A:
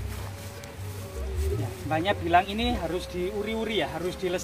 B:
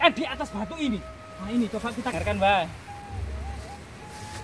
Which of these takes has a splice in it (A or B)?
B